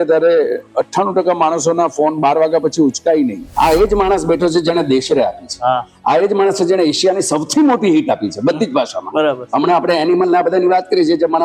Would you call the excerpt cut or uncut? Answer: cut